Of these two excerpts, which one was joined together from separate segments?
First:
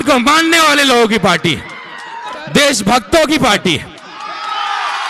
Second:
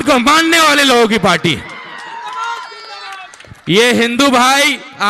first; 1 cut; at 2.3 s

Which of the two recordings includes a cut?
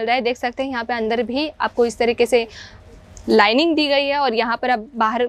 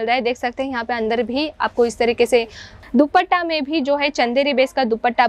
second; 1 cut; at 2.8 s

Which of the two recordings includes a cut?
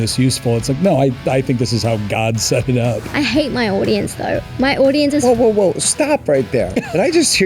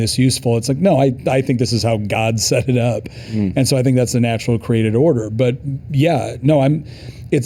first; 1 cut; at 3.0 s

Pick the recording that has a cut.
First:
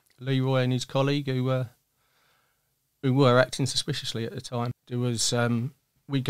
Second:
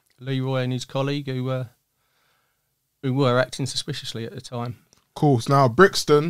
first; 1 cut; at 4.8 s

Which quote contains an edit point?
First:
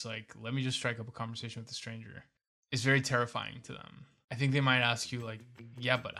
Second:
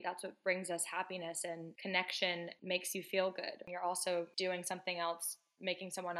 second; 2 cuts; at 2.6 s, 3.6 s

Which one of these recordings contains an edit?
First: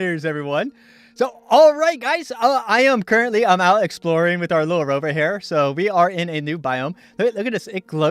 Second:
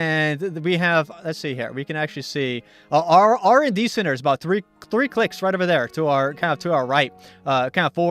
second; 1 cut; at 2.3 s

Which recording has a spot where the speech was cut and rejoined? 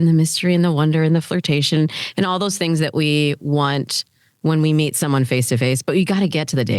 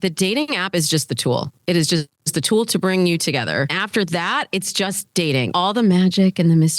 second; 2 cuts; at 3.8 s, 5.5 s

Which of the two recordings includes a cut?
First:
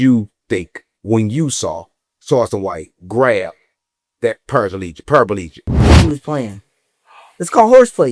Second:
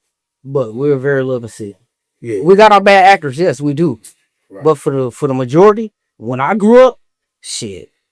first; 1 cut; at 5.7 s

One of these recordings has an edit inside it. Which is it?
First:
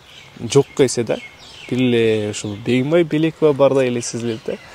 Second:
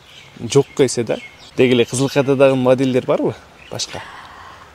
second; 1 cut; at 1.4 s

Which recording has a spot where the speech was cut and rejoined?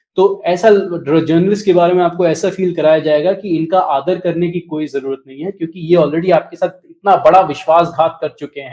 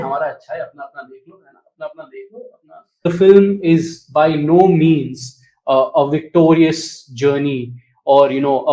second; 1 cut; at 3.1 s

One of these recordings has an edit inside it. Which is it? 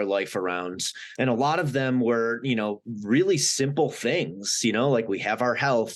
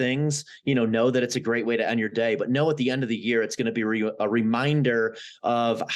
first; 1 cut; at 1.0 s

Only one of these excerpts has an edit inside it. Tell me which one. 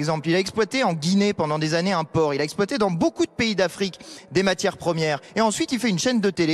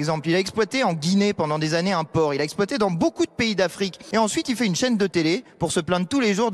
second; 1 cut; at 4.0 s

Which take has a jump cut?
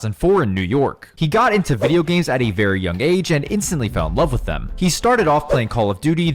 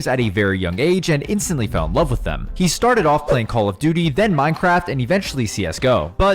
second; 1 cut; at 5.4 s

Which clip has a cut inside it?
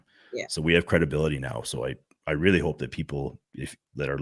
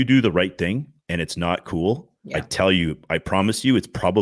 second; 2 cuts; at 1.0 s, 2.1 s

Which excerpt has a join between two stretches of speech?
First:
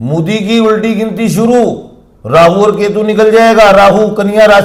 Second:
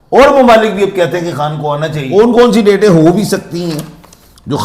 second; 1 cut; at 2.0 s

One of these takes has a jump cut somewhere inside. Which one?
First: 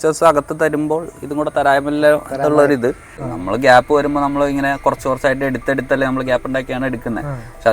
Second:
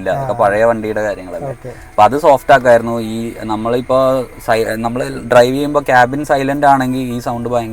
first; 1 cut; at 3.3 s

